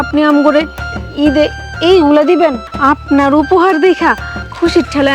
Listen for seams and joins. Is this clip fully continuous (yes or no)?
no